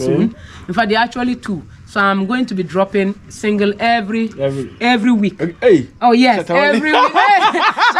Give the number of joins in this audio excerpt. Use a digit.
0